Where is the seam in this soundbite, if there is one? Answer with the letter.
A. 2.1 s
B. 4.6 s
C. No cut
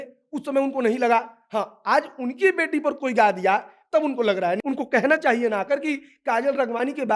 B